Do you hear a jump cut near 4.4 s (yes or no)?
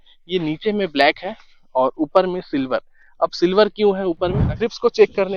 yes